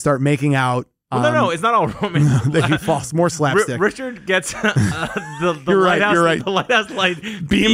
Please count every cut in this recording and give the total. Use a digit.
0